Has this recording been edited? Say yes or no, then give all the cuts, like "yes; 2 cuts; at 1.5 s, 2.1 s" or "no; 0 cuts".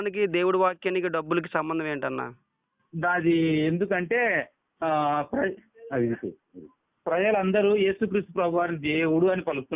no; 0 cuts